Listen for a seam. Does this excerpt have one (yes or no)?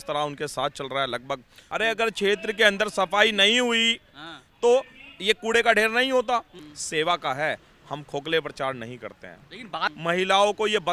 yes